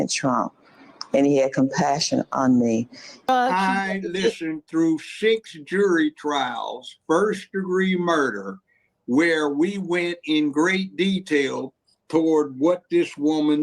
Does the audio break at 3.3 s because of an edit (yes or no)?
yes